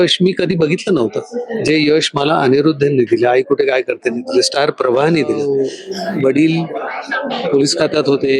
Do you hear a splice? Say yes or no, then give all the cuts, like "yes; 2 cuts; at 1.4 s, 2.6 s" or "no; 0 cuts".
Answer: yes; 1 cut; at 5.5 s